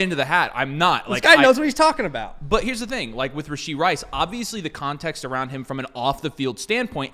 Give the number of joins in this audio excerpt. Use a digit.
0